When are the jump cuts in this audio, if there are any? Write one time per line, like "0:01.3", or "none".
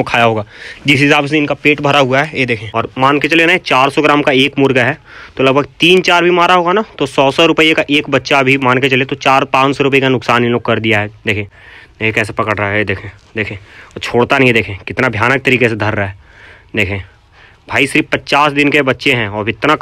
0:02.6
0:11.4